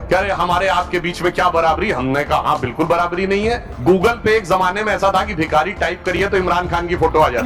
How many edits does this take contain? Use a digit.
1